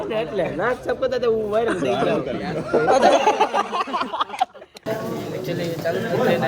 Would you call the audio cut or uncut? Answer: cut